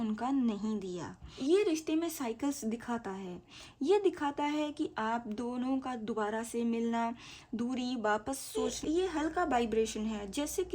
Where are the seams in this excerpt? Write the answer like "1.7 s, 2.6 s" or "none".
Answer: 1.3 s, 8.7 s